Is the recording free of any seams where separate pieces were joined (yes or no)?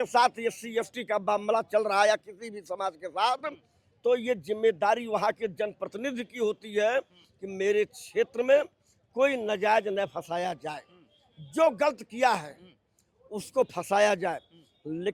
yes